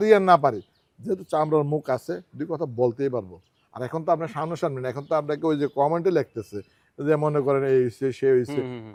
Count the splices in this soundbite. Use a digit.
0